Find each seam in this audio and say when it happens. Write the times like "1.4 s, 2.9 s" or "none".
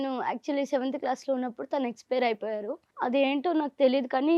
2.8 s